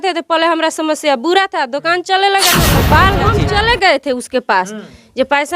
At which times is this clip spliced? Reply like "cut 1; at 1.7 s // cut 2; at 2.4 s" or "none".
cut 1; at 2.9 s